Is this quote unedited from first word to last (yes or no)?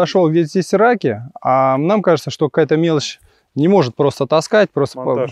yes